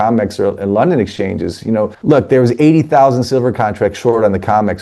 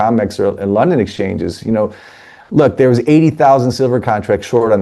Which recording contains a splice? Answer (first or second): first